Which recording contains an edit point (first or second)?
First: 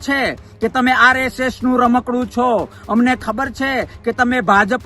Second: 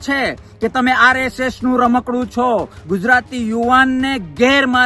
second